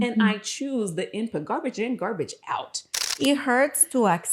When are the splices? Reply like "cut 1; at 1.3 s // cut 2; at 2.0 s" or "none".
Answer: cut 1; at 3.1 s

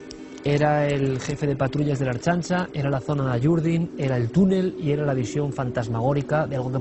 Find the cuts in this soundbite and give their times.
cut 1; at 4.2 s

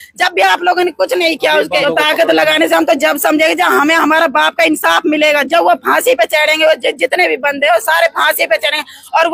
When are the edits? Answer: cut 1; at 1.8 s

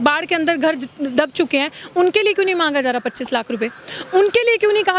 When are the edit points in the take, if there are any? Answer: none

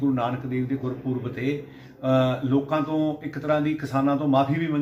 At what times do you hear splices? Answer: none

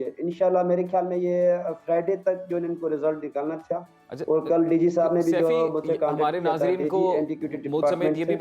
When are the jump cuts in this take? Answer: none

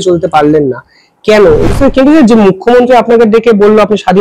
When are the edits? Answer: cut 1; at 1.6 s

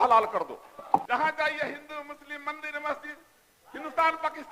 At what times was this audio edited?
cut 1; at 1.0 s

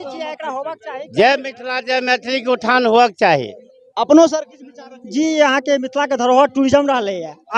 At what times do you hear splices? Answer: none

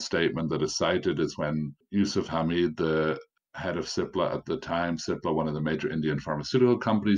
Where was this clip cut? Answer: none

